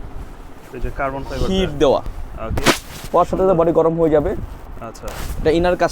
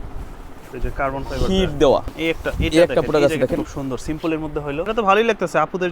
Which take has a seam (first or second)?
second